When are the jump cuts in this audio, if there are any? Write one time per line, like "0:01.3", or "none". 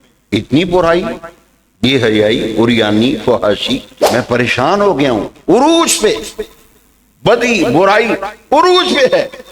0:03.9